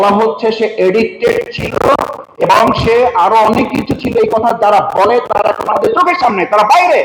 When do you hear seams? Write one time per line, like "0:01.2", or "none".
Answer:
none